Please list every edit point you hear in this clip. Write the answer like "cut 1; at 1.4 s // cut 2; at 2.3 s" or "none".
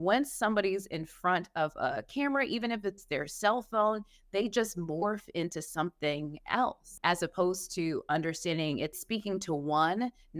cut 1; at 7.0 s // cut 2; at 9.0 s